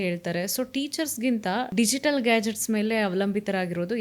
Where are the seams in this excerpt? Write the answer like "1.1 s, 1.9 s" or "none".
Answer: 1.7 s